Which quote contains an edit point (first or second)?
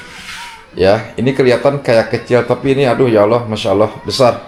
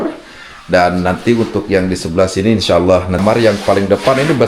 second